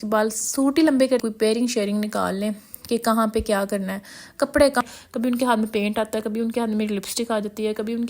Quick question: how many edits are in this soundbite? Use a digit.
2